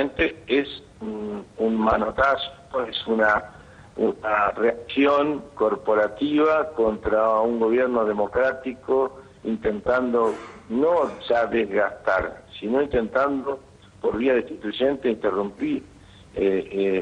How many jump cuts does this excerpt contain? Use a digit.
0